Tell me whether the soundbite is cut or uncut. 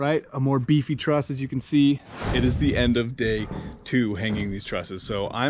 cut